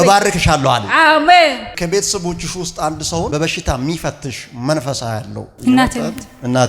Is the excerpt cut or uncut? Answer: cut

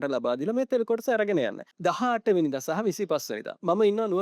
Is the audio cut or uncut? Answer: cut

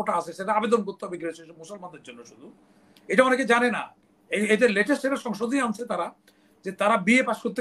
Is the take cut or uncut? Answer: uncut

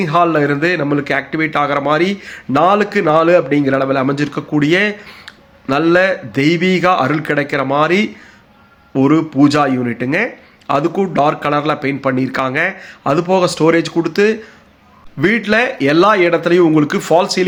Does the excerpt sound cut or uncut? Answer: uncut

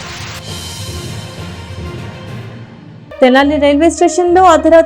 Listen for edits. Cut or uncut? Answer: cut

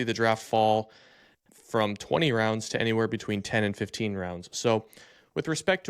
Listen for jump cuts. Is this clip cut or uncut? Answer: uncut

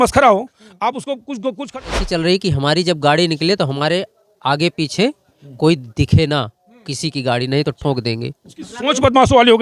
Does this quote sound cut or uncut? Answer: cut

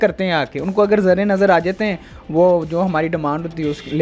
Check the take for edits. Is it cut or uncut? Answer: uncut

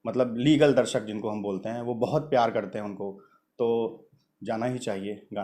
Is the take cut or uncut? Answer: uncut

